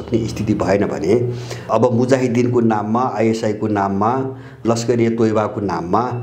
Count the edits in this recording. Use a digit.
2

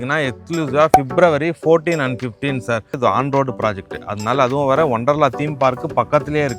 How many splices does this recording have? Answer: 1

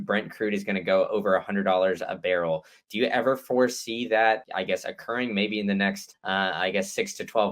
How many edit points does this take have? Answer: 2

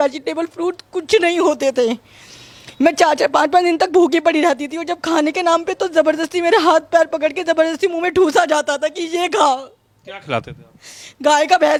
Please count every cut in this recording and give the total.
0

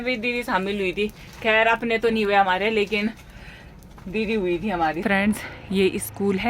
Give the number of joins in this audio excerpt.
1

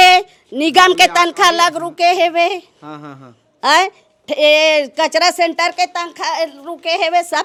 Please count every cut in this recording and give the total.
0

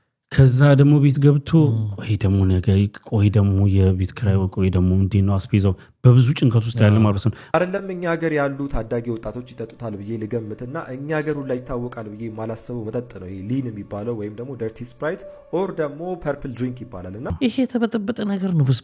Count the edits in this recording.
2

